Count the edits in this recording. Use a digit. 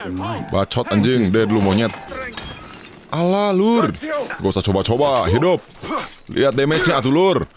2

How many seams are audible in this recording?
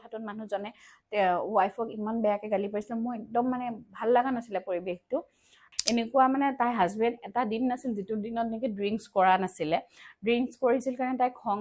1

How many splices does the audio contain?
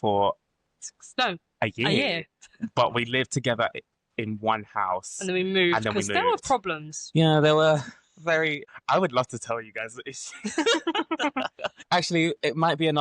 2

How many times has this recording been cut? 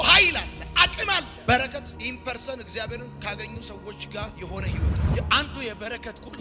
1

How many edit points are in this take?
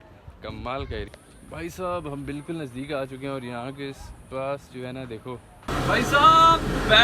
2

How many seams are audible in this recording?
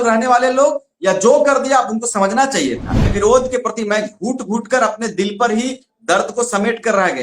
1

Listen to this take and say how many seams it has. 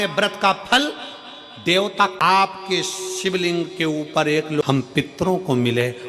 2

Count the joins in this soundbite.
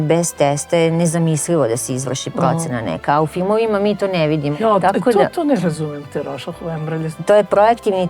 2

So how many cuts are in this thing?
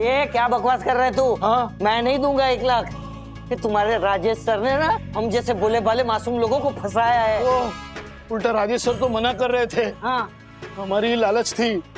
1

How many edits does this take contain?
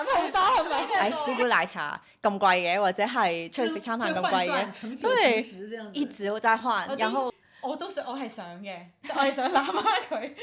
2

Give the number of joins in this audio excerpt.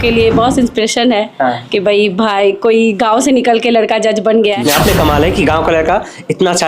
1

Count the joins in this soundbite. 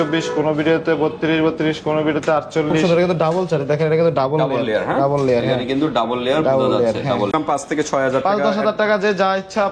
2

